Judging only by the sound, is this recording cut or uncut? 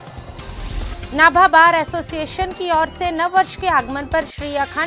cut